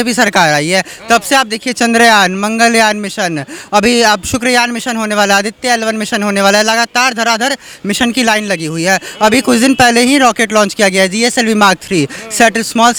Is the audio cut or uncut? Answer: uncut